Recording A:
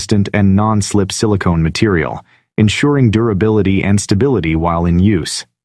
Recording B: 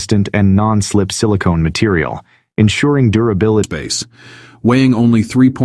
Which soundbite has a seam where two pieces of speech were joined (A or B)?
B